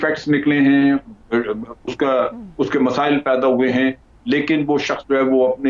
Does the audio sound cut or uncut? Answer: uncut